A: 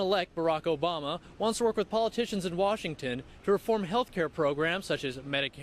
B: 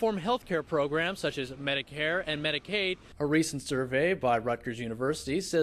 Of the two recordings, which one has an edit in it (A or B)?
B